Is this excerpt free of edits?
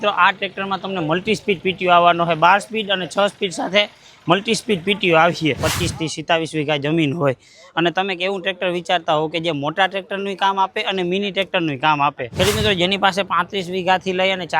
no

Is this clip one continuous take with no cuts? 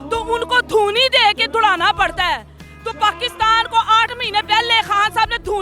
yes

